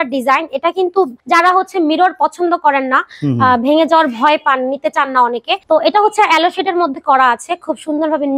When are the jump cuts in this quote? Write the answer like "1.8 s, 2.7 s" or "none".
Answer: 1.2 s, 5.5 s